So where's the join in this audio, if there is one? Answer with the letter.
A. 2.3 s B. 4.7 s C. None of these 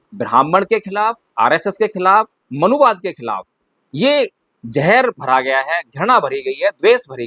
A